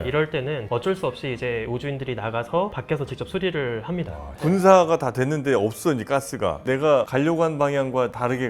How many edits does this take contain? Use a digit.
2